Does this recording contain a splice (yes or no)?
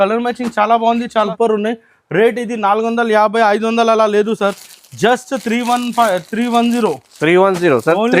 yes